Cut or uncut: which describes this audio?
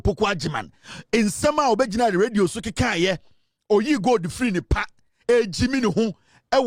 uncut